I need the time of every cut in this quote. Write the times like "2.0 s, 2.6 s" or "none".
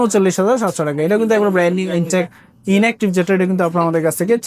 none